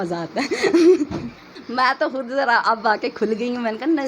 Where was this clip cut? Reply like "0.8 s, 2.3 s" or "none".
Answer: 1.6 s

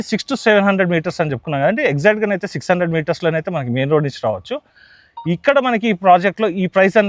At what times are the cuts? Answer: none

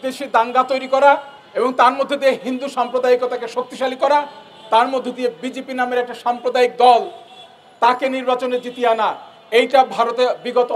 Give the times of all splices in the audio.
1.4 s

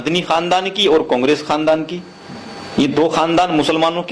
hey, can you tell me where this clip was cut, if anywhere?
none

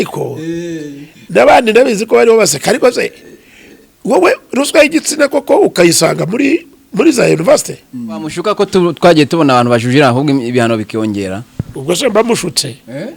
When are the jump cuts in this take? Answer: 8.3 s

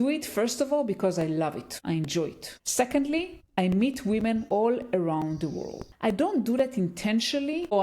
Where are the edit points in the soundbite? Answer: 5.8 s

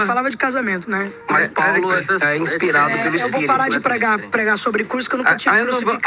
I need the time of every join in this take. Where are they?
none

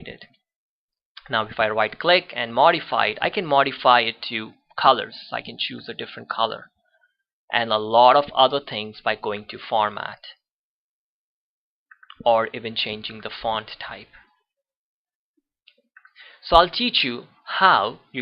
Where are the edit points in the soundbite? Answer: 1.7 s

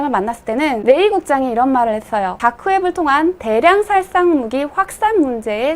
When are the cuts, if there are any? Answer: 0.8 s, 2.3 s

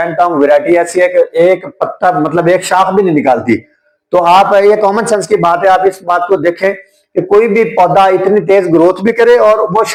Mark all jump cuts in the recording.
none

